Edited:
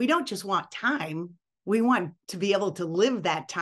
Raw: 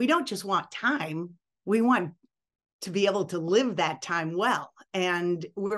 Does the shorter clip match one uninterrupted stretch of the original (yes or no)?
no